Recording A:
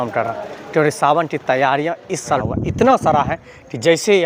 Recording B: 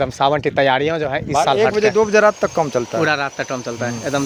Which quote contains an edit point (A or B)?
A